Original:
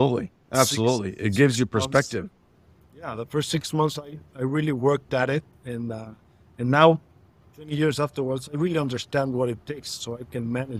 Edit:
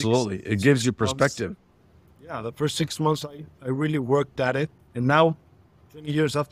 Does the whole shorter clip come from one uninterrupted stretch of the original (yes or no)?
no